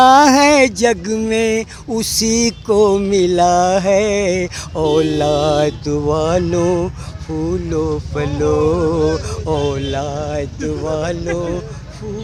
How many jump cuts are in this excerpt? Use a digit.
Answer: 0